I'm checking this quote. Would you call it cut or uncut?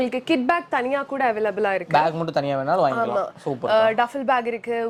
uncut